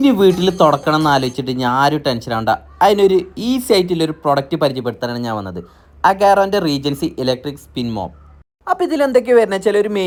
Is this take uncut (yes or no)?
yes